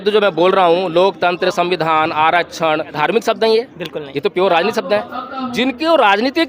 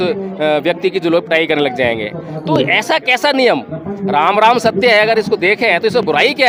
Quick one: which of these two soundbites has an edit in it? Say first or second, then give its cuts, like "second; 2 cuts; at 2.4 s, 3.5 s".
first; 1 cut; at 2.9 s